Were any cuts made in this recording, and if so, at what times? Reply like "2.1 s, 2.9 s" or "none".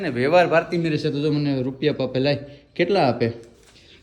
none